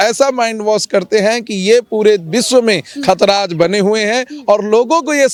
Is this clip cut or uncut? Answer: uncut